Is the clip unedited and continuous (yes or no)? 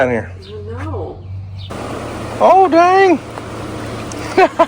no